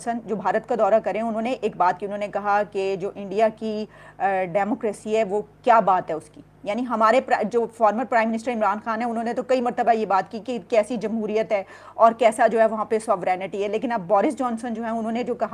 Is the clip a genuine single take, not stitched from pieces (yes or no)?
yes